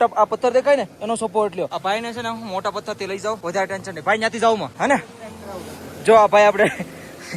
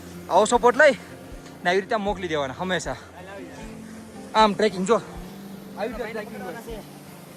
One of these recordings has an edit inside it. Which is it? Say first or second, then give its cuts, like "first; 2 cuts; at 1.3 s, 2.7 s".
first; 3 cuts; at 1.7 s, 3.4 s, 4.7 s